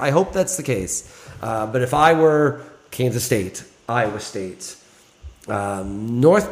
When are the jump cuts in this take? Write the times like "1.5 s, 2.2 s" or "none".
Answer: none